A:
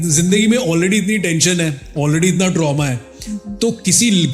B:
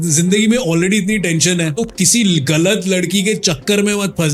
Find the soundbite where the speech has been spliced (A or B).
B